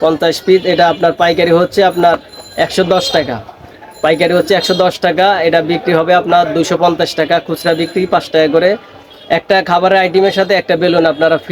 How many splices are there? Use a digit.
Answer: 0